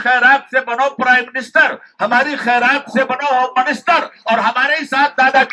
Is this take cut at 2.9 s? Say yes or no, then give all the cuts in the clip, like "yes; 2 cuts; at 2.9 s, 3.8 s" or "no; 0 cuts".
no; 0 cuts